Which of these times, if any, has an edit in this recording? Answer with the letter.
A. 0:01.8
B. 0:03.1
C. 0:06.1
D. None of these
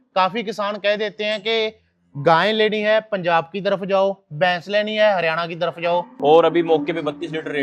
C